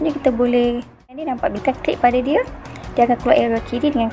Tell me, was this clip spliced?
yes; 1 cut; at 1.1 s

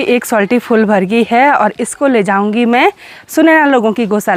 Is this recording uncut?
yes; 0 cuts

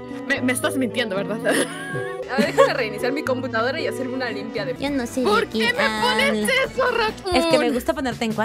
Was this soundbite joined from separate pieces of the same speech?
yes; 1 cut; at 4.8 s

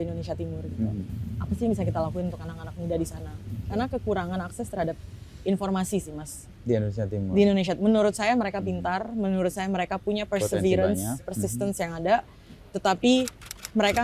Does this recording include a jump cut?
no; 0 cuts

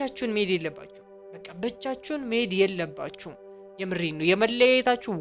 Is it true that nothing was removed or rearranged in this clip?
yes; 0 cuts

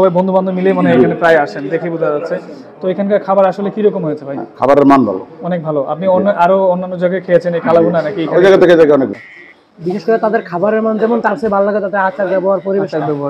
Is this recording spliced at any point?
yes; 1 cut; at 9.2 s

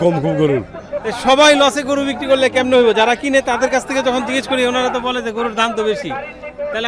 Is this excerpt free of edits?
yes; 0 cuts

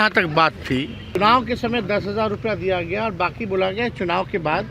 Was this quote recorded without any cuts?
no; 1 cut; at 1.1 s

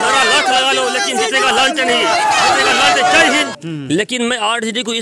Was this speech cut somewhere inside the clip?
yes; 1 cut; at 3.5 s

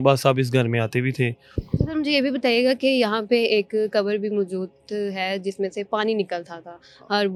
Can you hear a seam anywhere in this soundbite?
no; 0 cuts

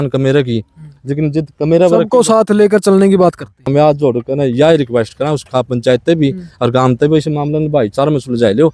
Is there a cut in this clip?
yes; 1 cut; at 3.7 s

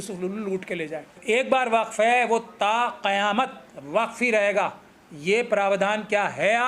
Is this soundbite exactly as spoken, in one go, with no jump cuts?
no; 1 cut; at 1.1 s

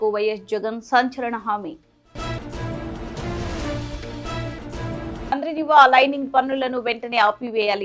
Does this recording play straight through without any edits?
yes; 0 cuts

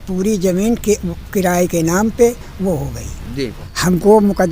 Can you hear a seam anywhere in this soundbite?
yes; 1 cut; at 3.2 s

